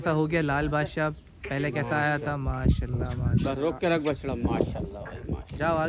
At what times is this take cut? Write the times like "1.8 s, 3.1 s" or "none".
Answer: none